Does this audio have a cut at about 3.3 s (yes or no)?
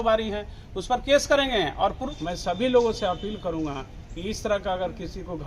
no